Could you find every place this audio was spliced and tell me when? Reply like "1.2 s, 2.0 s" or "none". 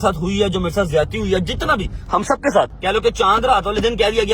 2.8 s